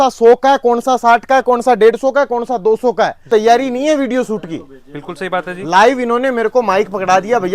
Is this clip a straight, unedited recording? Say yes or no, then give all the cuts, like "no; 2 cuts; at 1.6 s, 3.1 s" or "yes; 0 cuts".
no; 1 cut; at 3.2 s